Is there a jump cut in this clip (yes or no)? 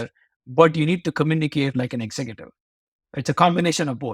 no